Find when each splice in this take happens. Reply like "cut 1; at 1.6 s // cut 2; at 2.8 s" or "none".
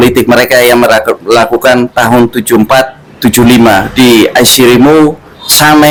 none